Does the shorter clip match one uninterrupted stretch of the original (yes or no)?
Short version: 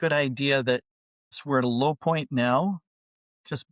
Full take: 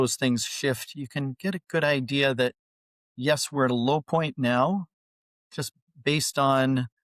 no